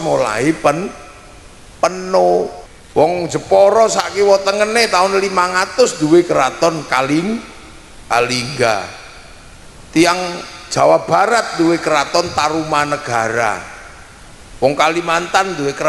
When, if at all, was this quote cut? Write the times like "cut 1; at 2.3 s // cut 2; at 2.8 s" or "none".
cut 1; at 2.6 s

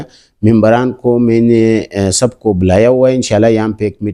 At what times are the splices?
none

